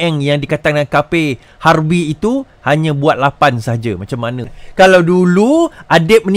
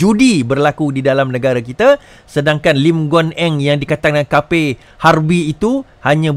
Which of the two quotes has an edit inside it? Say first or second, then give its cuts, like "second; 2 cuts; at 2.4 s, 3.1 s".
first; 1 cut; at 4.6 s